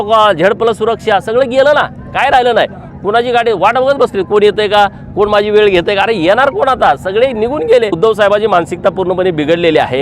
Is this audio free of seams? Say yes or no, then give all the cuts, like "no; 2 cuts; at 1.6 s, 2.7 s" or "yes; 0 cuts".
no; 1 cut; at 8.0 s